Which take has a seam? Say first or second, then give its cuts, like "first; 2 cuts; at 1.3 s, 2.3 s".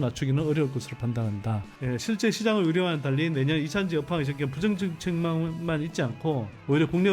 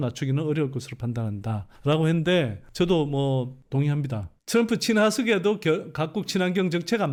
first; 1 cut; at 1.7 s